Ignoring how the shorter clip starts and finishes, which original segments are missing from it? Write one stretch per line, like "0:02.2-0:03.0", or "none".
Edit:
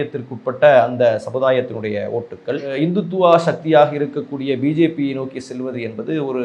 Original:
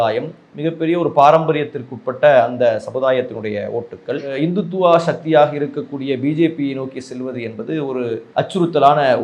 none